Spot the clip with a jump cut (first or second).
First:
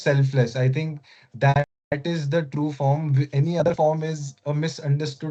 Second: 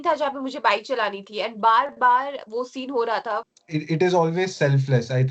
second